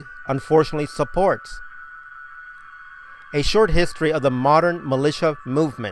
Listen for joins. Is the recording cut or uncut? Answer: uncut